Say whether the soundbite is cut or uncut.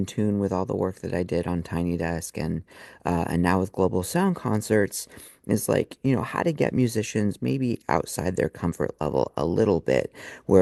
uncut